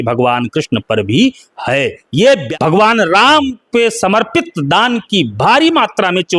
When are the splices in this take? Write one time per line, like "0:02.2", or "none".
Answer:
0:02.5